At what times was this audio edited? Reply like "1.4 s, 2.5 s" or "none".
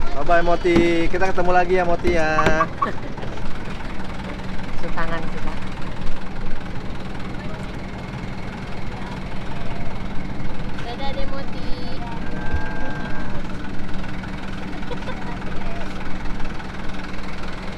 3.4 s